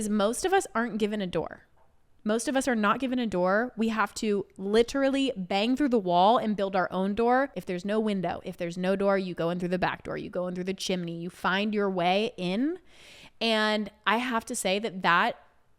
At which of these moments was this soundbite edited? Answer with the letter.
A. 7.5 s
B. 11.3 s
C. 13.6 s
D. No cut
A